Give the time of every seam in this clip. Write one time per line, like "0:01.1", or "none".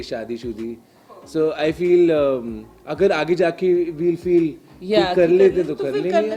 none